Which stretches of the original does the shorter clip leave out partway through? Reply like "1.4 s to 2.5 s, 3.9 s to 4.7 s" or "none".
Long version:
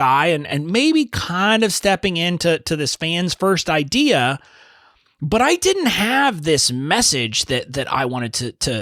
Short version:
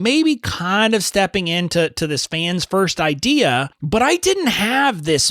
4.4 s to 5.1 s